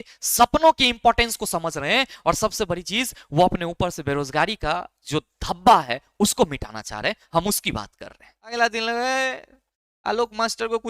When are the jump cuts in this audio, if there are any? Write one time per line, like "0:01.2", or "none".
0:08.5